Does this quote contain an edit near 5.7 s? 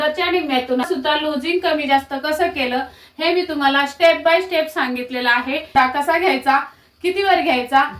yes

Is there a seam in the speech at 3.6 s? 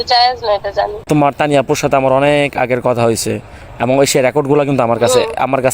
no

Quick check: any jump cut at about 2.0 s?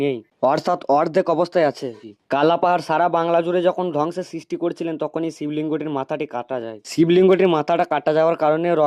yes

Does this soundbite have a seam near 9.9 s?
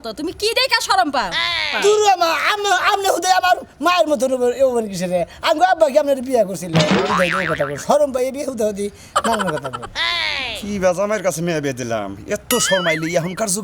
no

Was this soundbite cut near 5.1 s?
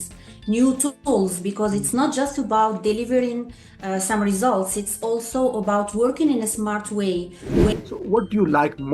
no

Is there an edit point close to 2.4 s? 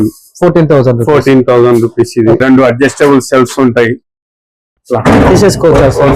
yes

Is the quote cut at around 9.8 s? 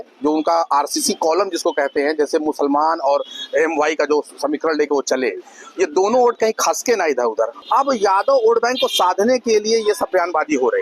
no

